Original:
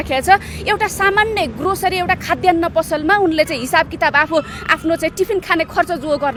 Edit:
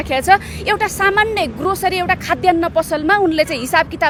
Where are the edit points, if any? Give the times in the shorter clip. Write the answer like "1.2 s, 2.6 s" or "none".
none